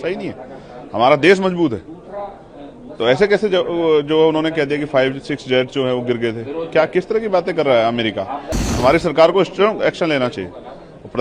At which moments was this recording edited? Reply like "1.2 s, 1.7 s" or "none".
8.7 s